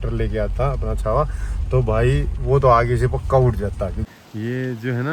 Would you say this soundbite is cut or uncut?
cut